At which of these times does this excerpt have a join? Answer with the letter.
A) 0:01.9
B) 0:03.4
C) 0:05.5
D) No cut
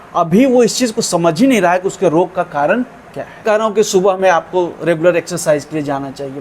B